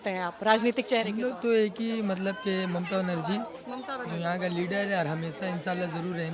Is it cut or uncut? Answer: uncut